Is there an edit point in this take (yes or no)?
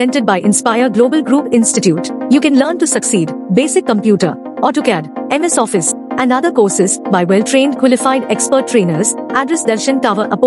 no